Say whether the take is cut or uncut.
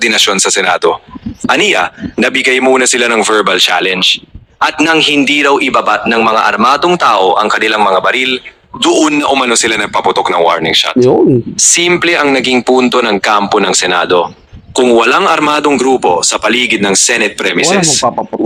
uncut